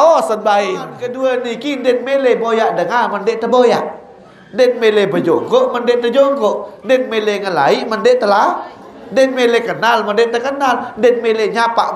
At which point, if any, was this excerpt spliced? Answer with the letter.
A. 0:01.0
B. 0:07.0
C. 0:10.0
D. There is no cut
A